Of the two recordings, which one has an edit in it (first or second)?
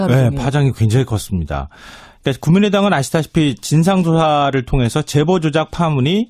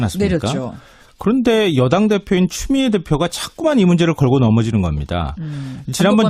first